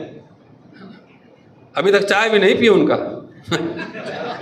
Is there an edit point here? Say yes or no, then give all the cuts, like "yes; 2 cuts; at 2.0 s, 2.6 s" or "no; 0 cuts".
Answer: no; 0 cuts